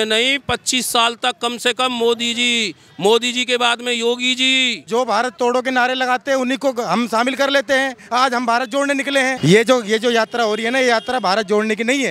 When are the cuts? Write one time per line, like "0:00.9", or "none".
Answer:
0:04.8
0:09.4